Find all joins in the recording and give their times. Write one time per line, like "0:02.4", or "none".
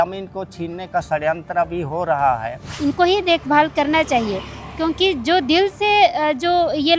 0:02.7

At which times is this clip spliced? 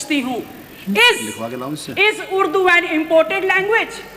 none

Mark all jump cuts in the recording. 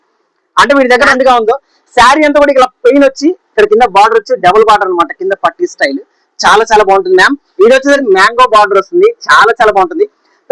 0:01.1
0:08.0

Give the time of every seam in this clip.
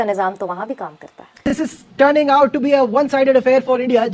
0:01.5

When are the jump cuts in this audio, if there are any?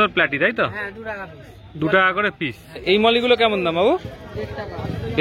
0:02.6

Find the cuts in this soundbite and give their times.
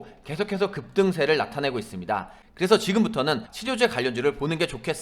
0:02.4
0:03.5

